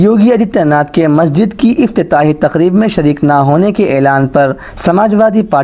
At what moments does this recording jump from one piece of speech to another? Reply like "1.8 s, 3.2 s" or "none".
none